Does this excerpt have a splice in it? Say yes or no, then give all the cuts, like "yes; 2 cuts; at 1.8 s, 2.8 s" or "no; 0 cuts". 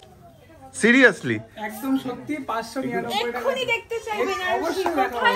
no; 0 cuts